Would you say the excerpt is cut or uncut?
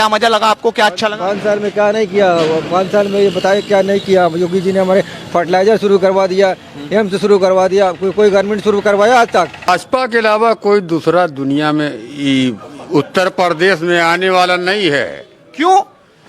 cut